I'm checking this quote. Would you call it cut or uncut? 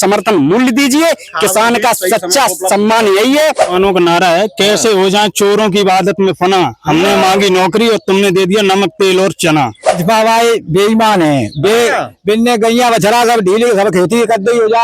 cut